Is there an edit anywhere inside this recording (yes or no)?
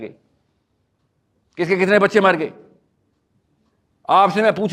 no